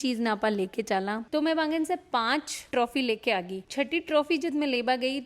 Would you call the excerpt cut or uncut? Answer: cut